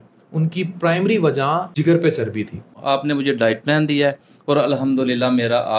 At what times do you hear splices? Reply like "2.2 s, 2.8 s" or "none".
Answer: 1.7 s, 2.8 s